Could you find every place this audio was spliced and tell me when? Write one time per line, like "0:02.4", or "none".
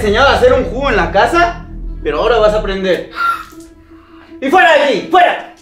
none